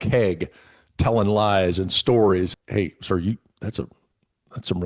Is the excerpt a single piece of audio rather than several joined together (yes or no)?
no